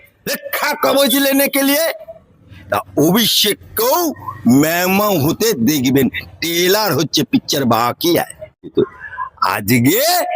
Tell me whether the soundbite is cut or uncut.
cut